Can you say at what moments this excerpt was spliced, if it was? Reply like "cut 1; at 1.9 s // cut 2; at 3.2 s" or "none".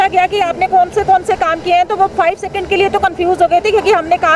none